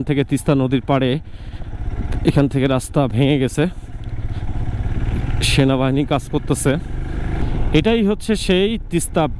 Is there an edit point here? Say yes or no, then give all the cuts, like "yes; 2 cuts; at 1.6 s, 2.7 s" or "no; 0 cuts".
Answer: yes; 1 cut; at 7.4 s